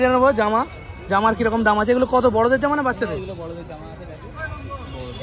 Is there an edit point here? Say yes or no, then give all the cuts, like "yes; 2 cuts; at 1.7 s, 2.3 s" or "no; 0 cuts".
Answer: no; 0 cuts